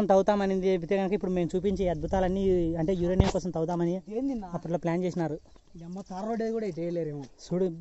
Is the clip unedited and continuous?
yes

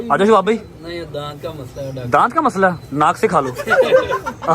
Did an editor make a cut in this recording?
yes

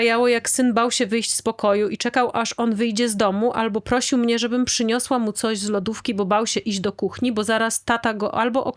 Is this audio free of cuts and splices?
yes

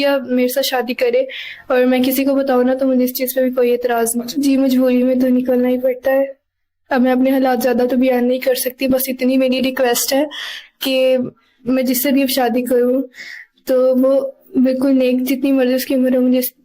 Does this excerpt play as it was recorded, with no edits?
no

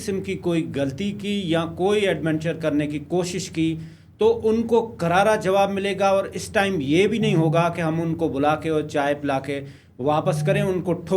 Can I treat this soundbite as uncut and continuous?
yes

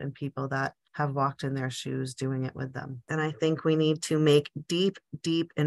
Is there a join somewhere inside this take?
yes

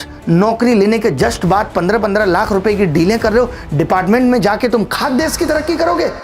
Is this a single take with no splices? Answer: yes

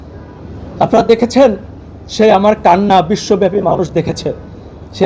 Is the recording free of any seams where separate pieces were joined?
yes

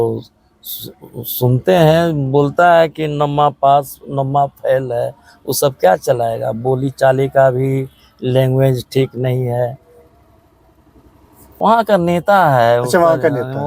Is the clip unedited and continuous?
no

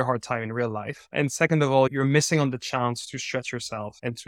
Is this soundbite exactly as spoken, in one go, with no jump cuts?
yes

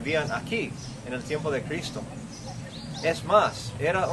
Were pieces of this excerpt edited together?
no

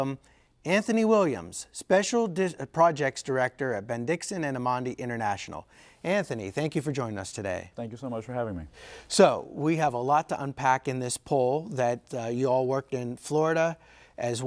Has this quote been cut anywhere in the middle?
no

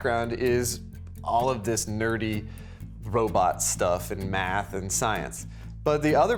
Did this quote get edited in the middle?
no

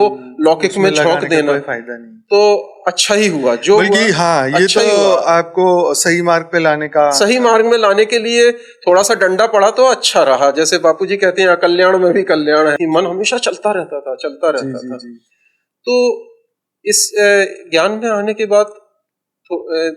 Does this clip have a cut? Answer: yes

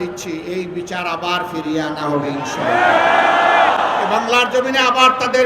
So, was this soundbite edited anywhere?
no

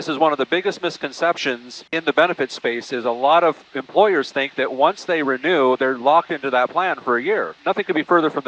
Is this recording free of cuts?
no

